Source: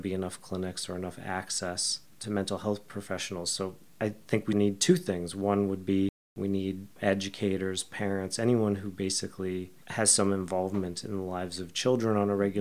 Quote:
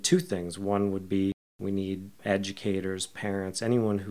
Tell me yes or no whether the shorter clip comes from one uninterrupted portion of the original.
yes